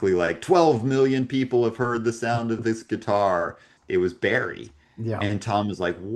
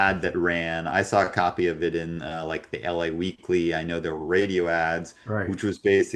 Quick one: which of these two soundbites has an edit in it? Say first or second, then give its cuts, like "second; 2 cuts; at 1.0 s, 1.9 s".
first; 1 cut; at 3.7 s